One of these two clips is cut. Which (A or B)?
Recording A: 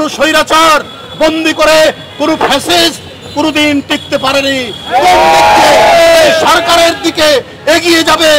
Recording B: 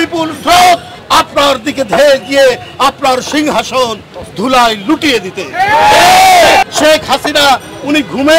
B